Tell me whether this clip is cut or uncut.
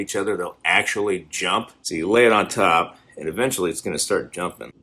cut